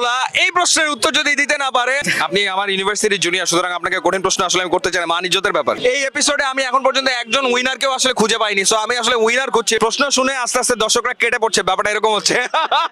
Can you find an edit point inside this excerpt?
yes; 3 cuts; at 2.1 s, 5.8 s, 9.8 s

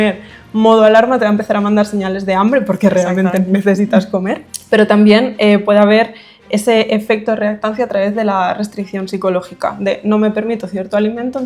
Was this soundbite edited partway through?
yes; 1 cut; at 4.5 s

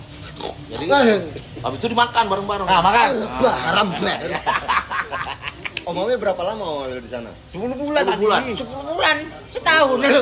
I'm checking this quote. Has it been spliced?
no; 0 cuts

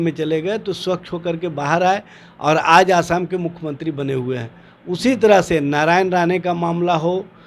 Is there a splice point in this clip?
no; 0 cuts

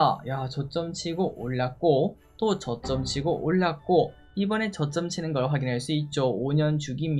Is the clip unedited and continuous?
yes; 0 cuts

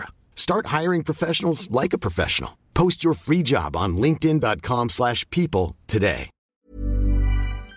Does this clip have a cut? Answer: yes; 1 cut; at 6.4 s

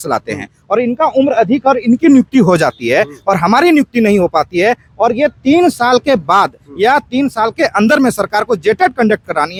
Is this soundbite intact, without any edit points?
yes; 0 cuts

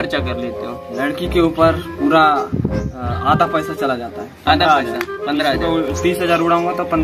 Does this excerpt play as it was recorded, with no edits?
yes; 0 cuts

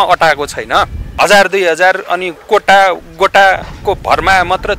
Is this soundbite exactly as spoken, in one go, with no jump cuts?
no; 1 cut; at 1.1 s

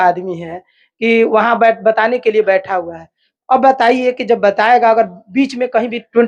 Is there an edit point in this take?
no; 0 cuts

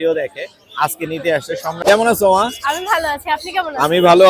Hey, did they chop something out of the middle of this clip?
yes; 1 cut; at 1.8 s

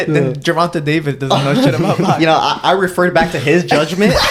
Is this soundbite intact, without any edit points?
yes; 0 cuts

